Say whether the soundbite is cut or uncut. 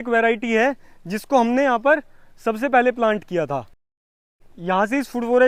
uncut